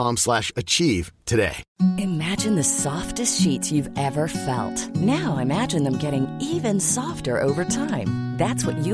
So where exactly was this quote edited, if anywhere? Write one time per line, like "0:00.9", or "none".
0:01.6